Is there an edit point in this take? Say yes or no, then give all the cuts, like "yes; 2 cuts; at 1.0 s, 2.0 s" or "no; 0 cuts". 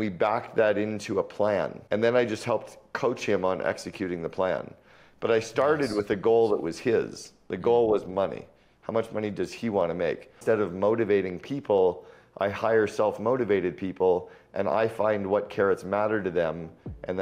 yes; 2 cuts; at 1.8 s, 10.4 s